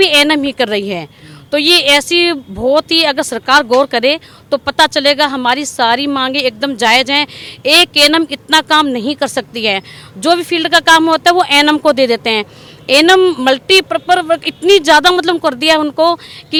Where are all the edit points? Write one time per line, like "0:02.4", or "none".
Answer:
none